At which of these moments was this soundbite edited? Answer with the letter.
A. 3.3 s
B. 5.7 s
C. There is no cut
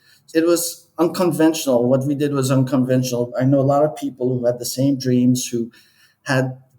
A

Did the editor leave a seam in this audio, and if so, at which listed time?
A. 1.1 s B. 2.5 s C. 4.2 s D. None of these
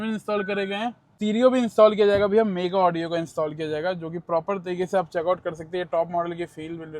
A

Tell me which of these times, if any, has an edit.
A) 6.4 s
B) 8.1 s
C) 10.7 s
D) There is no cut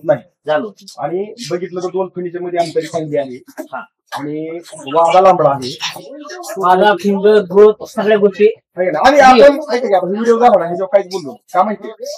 D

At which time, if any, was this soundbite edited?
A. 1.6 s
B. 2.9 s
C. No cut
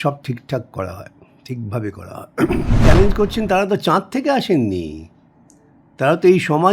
B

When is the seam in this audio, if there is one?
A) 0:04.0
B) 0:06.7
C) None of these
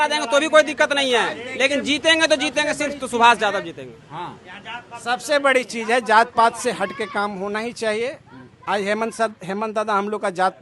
C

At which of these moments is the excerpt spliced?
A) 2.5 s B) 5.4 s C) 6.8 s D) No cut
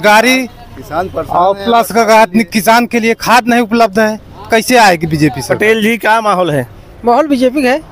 B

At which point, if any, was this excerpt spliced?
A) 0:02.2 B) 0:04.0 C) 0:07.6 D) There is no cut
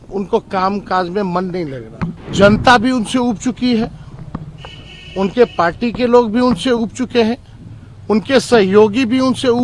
A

